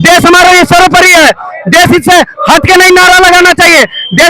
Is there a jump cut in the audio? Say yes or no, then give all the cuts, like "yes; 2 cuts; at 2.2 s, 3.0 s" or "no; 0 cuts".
no; 0 cuts